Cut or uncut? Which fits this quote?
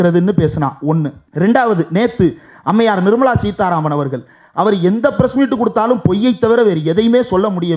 cut